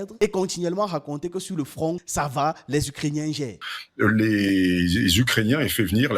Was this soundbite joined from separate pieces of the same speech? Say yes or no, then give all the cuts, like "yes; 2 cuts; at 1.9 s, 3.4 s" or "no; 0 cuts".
yes; 1 cut; at 3.6 s